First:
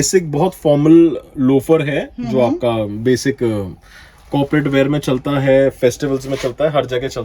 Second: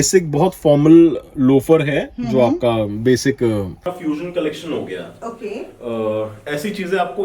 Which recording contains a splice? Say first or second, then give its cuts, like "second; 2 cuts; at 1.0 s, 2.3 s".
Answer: second; 1 cut; at 3.9 s